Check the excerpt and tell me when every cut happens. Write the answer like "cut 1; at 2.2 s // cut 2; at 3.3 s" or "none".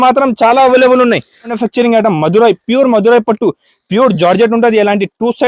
cut 1; at 1.6 s